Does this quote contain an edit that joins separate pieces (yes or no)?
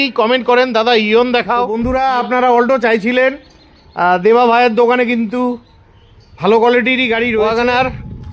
yes